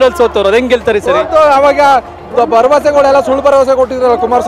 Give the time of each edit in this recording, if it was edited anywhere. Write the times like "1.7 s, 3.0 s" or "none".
none